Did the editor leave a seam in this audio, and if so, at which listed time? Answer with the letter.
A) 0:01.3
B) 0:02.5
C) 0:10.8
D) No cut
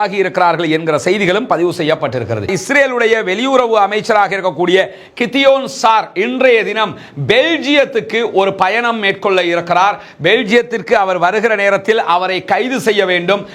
B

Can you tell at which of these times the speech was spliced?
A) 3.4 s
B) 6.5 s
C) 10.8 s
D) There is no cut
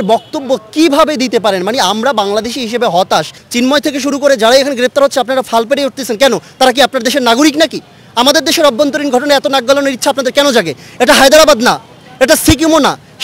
A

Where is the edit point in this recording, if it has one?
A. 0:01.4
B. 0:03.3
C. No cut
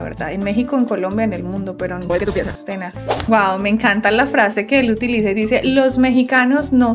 B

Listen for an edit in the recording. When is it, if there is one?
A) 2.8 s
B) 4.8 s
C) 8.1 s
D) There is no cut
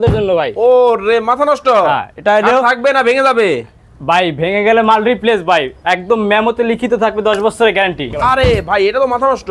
C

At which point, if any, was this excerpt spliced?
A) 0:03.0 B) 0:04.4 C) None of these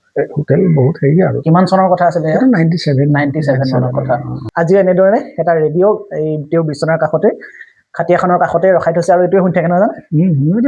B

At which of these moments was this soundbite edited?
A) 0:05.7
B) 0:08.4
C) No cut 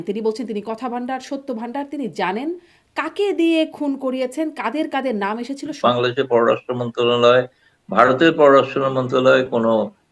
A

